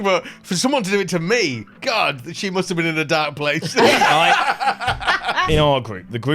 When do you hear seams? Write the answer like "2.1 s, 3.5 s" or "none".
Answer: 5.4 s